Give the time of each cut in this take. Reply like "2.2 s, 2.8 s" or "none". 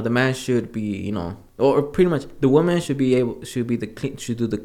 1.4 s